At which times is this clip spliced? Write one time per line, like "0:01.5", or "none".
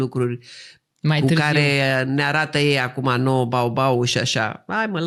none

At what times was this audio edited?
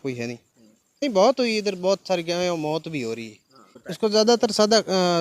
0:01.0
0:03.7

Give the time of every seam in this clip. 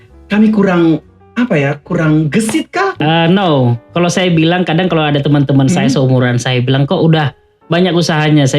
0:03.0

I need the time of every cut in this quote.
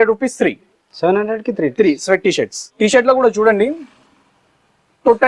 0:02.6

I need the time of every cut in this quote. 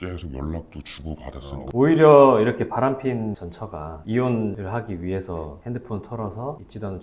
0:01.7

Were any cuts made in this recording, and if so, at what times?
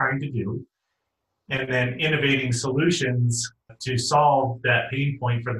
0:03.7

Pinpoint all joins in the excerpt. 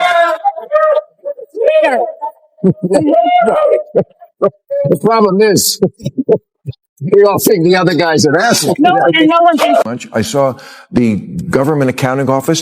0:10.0

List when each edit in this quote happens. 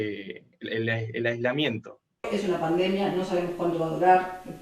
0:02.2

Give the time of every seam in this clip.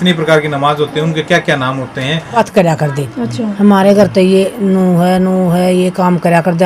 0:02.4

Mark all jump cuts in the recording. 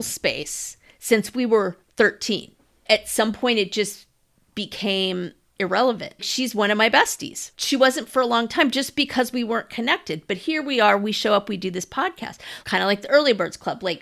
0:02.8
0:05.5
0:06.3
0:07.5
0:12.5

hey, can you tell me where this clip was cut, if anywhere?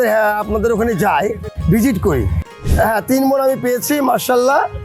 0:01.5
0:02.5

